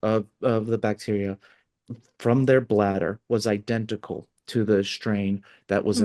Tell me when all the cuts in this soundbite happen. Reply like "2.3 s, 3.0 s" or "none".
none